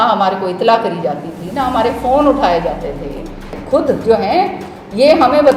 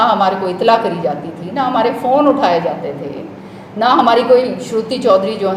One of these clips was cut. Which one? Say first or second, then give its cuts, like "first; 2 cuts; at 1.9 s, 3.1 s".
first; 1 cut; at 3.5 s